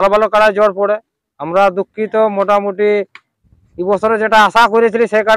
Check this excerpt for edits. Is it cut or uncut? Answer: uncut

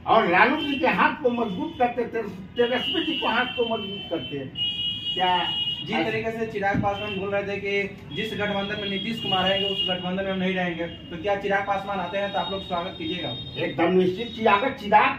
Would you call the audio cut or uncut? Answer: uncut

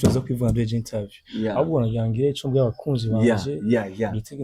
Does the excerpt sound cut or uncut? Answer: uncut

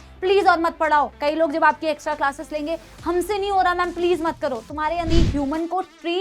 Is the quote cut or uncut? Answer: cut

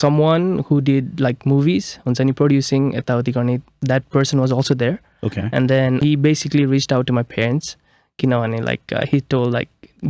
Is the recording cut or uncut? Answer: uncut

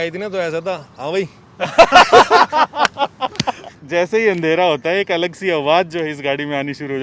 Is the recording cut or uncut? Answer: cut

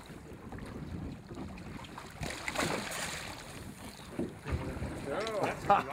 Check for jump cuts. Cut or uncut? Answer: uncut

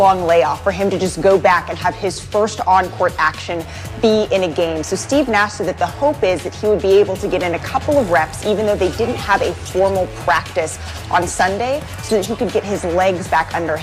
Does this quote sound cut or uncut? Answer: uncut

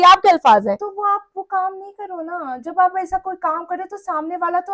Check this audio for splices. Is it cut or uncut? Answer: uncut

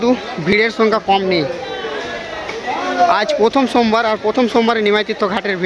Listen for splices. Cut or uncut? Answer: uncut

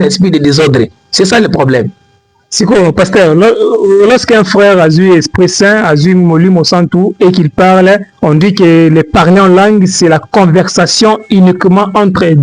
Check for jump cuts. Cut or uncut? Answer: uncut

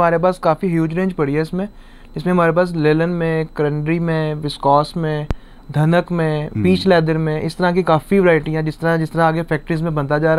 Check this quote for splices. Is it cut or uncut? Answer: uncut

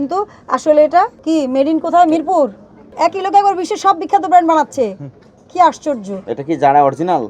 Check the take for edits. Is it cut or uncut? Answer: cut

